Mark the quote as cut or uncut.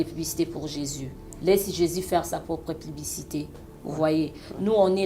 uncut